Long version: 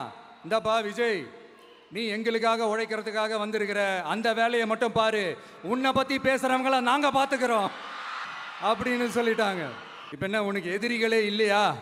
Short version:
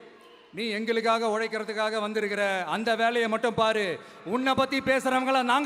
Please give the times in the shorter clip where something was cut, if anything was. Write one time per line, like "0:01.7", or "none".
none